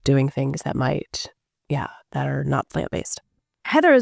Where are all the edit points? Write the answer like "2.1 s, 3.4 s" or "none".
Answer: none